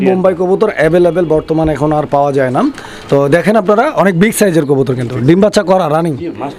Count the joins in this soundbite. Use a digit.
0